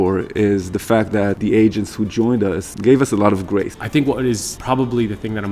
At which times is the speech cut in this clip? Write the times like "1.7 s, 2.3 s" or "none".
1.4 s, 2.7 s, 3.8 s, 4.5 s